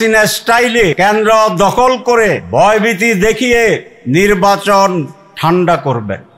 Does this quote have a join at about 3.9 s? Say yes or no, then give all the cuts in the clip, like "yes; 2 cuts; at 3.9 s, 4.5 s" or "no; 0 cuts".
yes; 4 cuts; at 0.9 s, 2.4 s, 3.9 s, 5.2 s